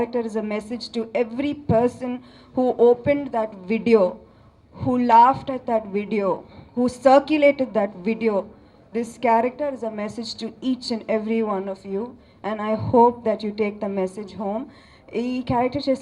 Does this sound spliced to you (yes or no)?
no